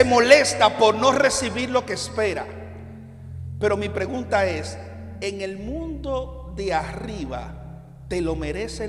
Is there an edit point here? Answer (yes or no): no